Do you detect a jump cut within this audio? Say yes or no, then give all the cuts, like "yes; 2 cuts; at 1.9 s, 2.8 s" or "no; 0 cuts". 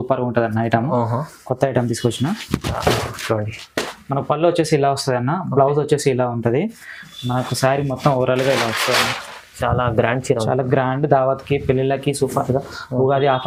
no; 0 cuts